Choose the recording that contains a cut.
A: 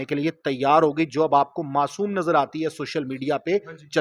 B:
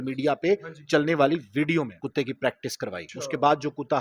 B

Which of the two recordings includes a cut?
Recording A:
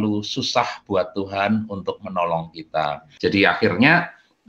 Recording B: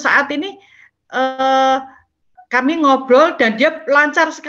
A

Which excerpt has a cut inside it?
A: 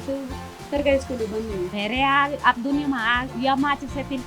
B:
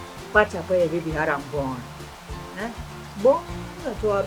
A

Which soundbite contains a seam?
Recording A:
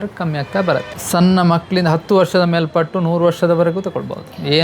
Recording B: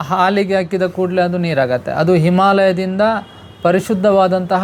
A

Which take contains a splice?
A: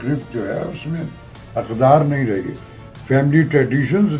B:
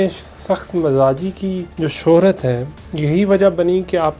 B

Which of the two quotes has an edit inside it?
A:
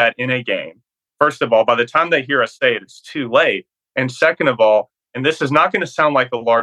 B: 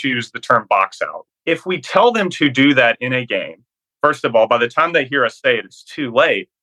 B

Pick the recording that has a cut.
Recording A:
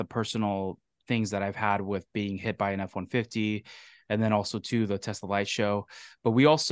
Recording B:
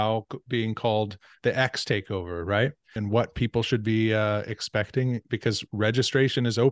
B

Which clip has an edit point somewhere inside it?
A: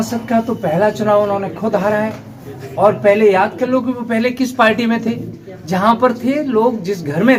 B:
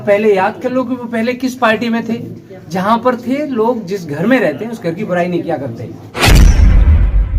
B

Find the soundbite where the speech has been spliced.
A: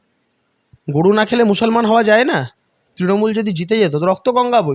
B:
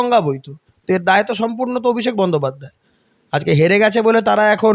A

